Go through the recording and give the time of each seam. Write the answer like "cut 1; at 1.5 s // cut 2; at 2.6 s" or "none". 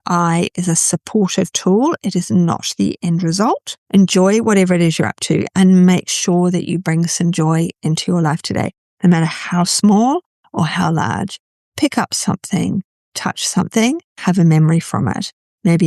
cut 1; at 3.7 s